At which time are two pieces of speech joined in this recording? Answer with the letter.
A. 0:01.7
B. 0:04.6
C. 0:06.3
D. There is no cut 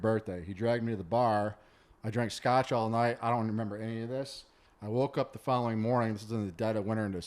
D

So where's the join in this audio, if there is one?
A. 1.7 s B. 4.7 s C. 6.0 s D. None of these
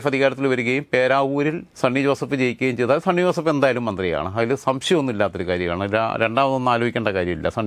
A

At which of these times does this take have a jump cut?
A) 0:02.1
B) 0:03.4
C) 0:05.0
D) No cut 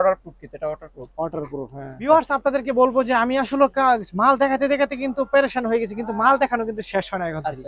A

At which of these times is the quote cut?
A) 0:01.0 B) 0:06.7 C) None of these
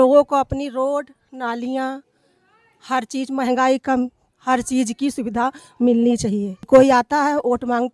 B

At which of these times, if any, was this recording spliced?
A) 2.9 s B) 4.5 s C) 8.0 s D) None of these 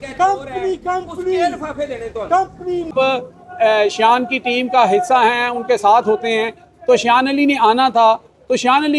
A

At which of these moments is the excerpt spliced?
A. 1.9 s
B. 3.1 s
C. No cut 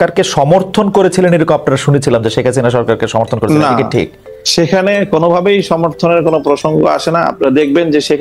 C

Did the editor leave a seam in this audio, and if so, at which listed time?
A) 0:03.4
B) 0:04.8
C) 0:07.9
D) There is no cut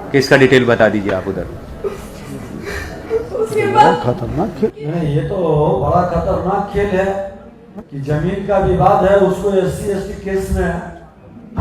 B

